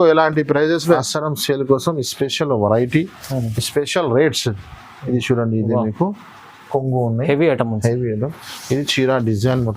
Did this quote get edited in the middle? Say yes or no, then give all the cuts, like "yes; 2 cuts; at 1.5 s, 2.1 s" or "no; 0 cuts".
yes; 1 cut; at 1.0 s